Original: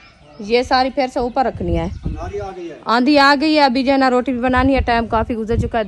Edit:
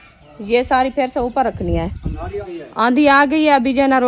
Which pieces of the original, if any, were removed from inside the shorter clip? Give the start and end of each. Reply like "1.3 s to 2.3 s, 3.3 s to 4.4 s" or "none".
2.5 s to 2.6 s